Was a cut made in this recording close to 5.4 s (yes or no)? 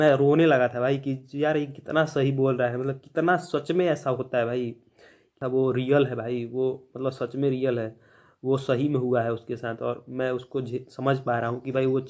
yes